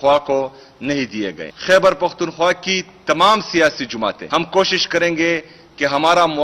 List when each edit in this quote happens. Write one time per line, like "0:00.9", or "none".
0:01.5
0:04.2